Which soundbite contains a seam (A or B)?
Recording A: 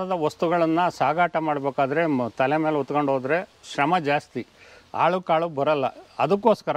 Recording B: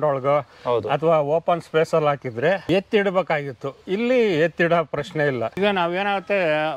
B